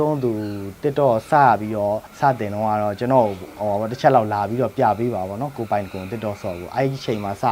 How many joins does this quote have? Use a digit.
1